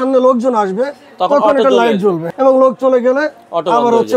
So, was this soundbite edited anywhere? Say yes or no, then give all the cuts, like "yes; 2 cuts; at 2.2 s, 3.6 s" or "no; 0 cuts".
yes; 1 cut; at 2.3 s